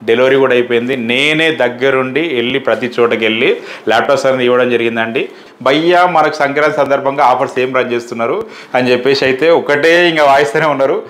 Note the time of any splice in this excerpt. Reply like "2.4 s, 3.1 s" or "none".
5.4 s